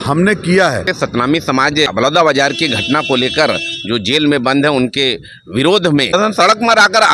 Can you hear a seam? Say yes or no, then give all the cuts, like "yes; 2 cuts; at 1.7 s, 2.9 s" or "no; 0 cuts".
yes; 3 cuts; at 0.9 s, 1.9 s, 6.1 s